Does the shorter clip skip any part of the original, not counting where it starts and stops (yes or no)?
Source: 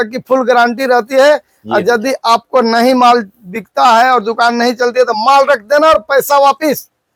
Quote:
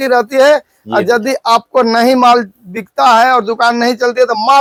no